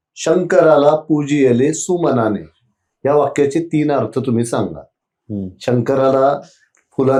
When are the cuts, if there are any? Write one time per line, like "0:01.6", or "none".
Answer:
none